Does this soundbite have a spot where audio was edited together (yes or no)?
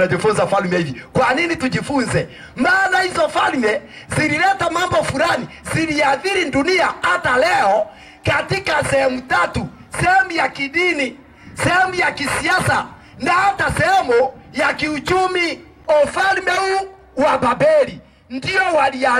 yes